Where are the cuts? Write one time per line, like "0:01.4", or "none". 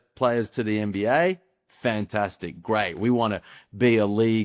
none